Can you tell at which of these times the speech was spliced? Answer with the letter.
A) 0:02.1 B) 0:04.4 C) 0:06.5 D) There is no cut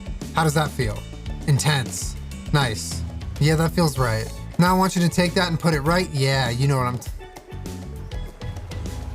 B